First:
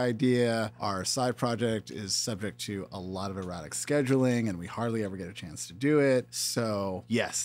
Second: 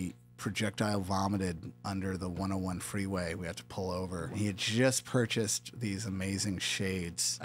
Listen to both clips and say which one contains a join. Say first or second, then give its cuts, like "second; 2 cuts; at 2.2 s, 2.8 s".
second; 1 cut; at 4.3 s